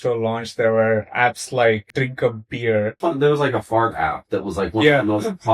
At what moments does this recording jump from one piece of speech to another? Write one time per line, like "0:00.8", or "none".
0:01.9
0:03.0

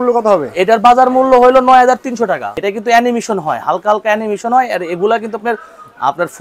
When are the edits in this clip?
0:02.5

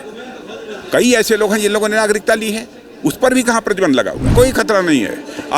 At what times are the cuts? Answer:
0:04.3

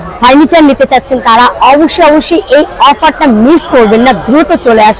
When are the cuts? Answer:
none

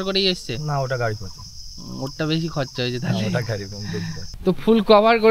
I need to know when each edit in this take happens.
0:04.2

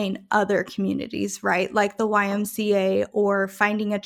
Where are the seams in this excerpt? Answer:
none

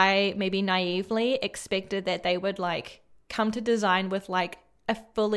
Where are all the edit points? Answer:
none

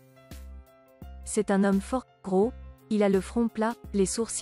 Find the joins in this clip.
0:01.3

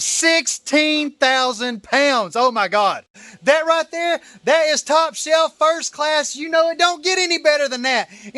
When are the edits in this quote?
0:03.2

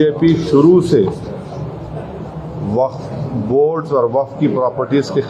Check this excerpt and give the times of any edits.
none

